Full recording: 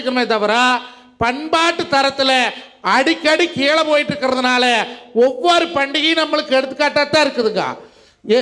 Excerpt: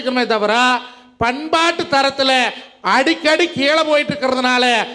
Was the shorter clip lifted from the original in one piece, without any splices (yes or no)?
yes